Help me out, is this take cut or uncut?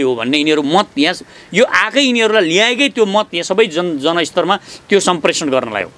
uncut